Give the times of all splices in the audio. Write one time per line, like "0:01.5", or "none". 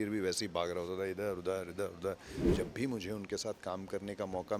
0:02.4